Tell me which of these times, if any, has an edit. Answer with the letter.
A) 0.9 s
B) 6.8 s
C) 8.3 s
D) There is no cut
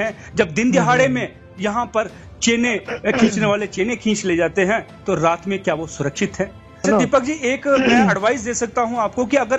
B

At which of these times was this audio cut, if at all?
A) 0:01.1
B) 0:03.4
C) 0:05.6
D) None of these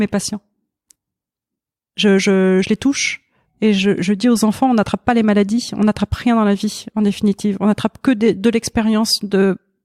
D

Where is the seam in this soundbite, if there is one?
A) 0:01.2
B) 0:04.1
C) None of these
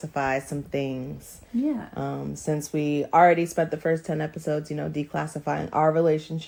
C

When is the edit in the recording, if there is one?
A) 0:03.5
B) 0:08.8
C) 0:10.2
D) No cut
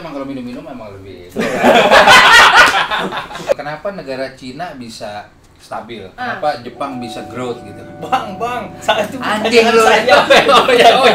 A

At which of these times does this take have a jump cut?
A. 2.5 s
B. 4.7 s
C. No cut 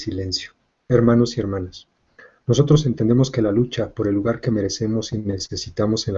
B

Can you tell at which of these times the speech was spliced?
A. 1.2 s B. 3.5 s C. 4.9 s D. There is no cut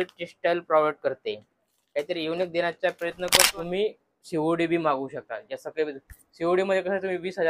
B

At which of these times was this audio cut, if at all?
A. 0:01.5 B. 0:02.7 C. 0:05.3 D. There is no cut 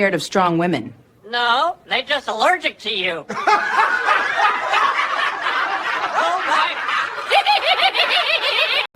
D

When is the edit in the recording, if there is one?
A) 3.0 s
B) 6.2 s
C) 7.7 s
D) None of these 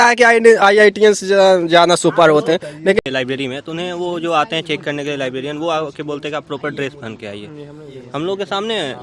A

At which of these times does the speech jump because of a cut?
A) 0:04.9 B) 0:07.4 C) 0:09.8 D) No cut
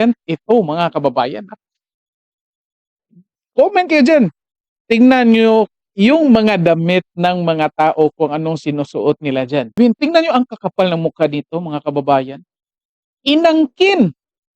C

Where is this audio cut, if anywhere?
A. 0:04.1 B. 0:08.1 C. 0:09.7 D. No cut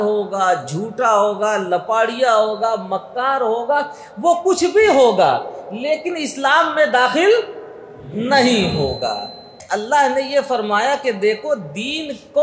C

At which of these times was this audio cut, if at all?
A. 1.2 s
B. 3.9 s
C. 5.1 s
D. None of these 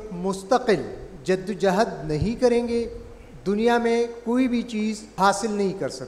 C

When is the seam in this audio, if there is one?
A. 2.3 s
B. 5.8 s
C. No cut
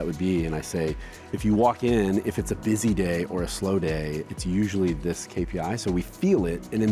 C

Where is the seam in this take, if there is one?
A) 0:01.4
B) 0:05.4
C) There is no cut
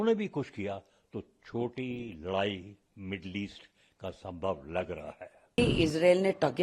B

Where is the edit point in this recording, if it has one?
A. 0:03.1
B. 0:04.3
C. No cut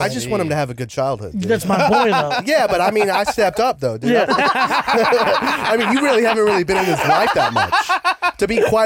B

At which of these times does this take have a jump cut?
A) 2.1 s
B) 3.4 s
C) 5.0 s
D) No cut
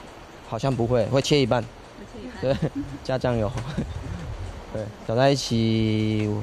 C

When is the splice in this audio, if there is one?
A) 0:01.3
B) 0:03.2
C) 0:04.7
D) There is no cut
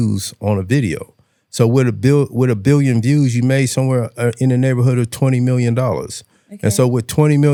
D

